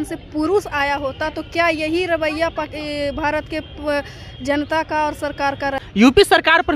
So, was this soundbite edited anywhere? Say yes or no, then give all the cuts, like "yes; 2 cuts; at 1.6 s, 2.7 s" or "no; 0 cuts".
yes; 1 cut; at 5.8 s